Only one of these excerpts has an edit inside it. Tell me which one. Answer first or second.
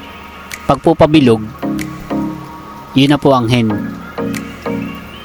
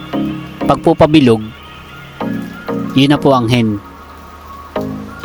second